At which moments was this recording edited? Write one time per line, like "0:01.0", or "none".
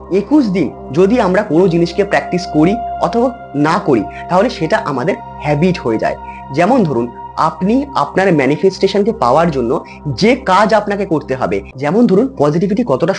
0:12.0